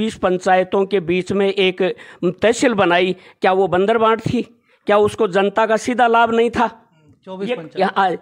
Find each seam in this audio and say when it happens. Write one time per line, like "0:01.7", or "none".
none